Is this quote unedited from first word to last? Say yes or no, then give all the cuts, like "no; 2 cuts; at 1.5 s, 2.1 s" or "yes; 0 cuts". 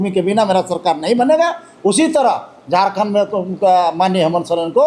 yes; 0 cuts